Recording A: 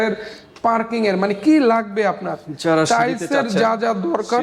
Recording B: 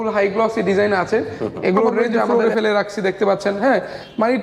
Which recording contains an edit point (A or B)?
B